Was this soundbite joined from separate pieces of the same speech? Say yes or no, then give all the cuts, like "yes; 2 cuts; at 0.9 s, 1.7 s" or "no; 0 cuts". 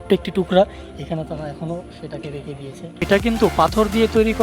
yes; 1 cut; at 3.0 s